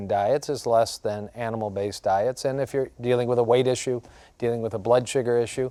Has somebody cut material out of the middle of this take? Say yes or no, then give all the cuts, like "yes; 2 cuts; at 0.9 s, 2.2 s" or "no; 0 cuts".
no; 0 cuts